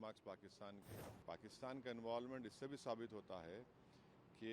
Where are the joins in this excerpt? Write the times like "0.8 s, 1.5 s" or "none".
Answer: 0.9 s